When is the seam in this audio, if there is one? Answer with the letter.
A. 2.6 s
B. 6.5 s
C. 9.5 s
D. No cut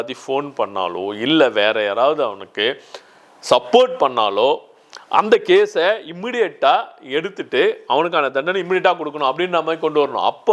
D